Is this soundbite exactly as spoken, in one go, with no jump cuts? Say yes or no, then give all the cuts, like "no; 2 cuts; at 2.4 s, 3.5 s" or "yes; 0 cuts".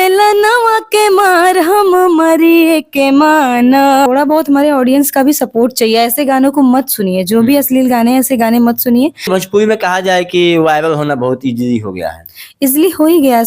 no; 2 cuts; at 4.1 s, 9.3 s